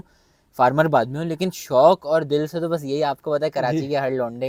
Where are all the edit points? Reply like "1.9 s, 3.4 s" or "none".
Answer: none